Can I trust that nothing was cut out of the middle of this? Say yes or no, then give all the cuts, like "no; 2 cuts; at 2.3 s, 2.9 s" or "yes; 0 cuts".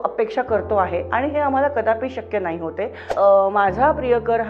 no; 1 cut; at 3.1 s